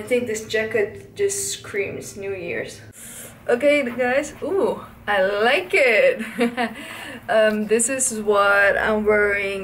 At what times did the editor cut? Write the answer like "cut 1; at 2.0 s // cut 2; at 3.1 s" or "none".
none